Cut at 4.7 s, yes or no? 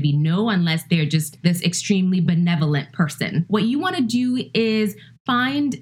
no